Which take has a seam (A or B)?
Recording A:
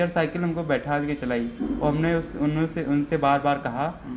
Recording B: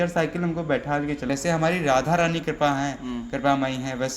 B